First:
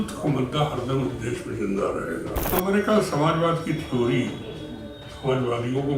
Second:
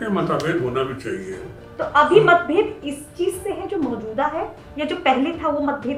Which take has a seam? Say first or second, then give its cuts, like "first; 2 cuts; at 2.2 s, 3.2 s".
first; 1 cut; at 2.4 s